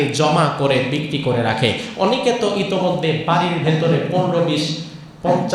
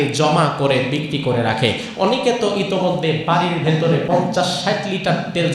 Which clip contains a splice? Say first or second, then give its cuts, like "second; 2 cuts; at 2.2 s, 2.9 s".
second; 1 cut; at 4.0 s